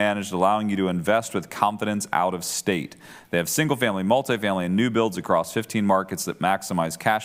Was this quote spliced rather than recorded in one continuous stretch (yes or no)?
no